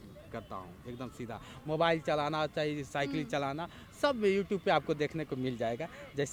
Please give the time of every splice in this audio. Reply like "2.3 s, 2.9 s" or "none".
none